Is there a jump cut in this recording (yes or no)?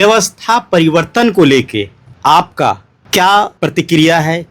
yes